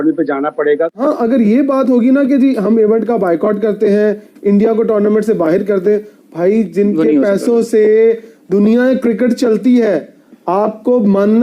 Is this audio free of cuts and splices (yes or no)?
no